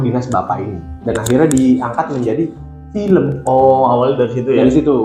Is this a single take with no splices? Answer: yes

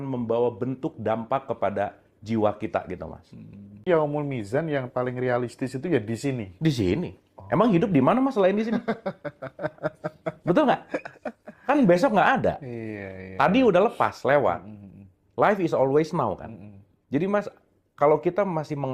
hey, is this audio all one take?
no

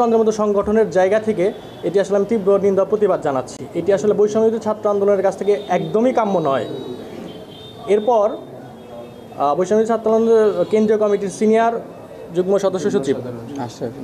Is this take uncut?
yes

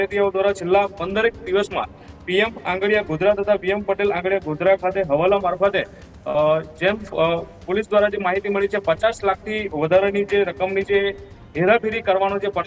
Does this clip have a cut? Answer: no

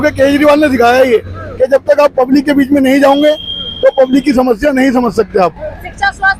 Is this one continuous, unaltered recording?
yes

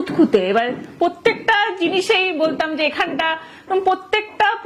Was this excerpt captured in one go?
yes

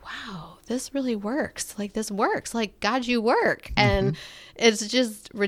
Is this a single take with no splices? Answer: yes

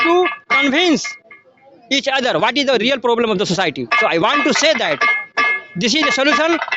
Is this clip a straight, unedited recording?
yes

